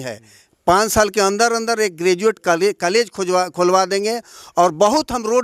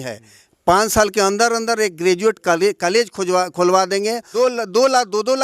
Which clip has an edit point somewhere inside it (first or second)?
second